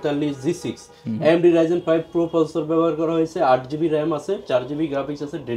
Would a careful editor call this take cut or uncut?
uncut